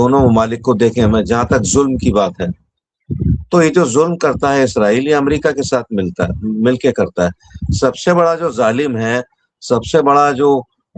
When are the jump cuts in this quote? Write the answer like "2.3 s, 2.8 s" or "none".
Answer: none